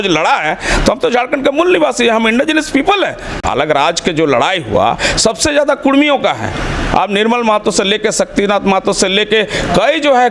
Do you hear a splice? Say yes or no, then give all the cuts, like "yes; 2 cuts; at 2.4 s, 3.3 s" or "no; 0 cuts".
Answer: yes; 1 cut; at 3.4 s